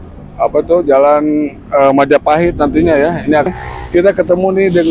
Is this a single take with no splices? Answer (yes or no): no